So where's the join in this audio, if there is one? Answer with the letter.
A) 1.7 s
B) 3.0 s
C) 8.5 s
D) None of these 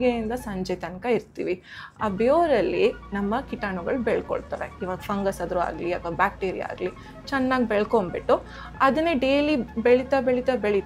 D